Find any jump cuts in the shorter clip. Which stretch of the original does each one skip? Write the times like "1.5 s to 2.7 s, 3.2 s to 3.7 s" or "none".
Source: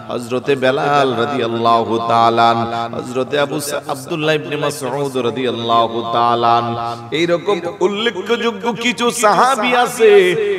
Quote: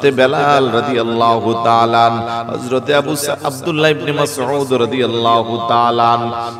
none